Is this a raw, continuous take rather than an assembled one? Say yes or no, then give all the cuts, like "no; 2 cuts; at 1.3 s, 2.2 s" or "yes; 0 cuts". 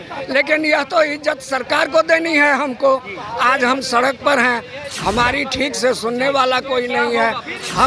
yes; 0 cuts